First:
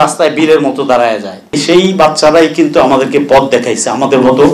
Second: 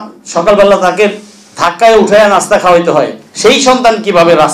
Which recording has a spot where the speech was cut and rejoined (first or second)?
first